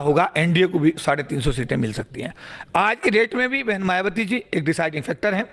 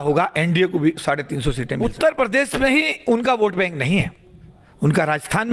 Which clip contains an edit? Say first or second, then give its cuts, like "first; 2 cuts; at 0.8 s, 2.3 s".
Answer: second; 1 cut; at 1.8 s